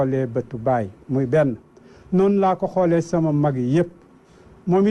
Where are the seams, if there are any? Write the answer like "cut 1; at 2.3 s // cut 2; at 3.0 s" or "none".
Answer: cut 1; at 3.2 s